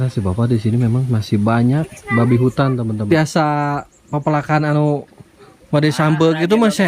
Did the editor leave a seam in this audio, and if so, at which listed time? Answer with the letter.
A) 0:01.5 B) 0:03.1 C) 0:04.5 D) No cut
B